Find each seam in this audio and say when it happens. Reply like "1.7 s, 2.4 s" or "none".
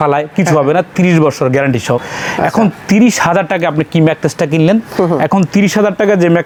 none